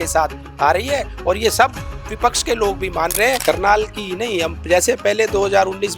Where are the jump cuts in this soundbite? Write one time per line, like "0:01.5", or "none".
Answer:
0:03.4

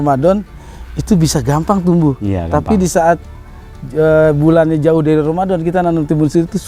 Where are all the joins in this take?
none

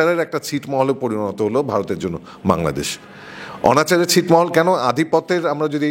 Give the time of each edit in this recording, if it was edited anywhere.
none

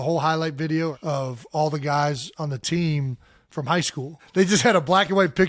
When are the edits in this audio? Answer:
0:01.0
0:04.2

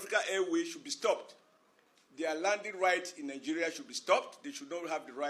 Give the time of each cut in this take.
none

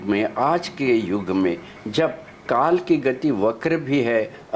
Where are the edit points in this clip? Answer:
none

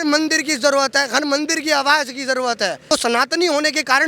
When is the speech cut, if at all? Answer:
0:02.9

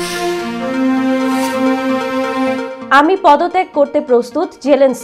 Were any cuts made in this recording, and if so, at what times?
0:02.8

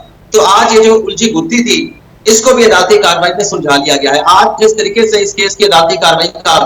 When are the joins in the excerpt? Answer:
none

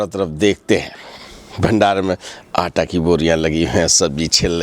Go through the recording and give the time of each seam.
none

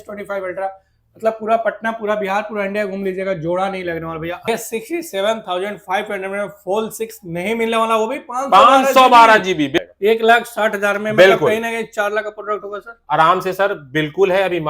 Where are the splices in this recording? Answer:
0:04.5
0:09.8

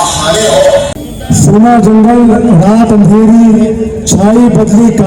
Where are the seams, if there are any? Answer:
0:01.0

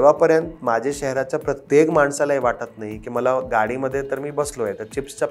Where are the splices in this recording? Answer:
none

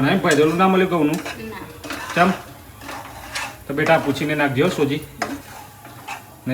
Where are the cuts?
none

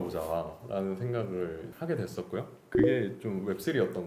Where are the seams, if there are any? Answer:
none

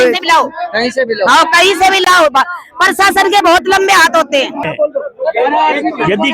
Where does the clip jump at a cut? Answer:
0:04.6

